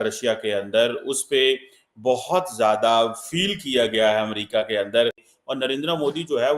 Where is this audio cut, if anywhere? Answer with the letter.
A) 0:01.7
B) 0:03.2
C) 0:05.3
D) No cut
C